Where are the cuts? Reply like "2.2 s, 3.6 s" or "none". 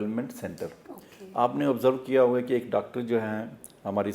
none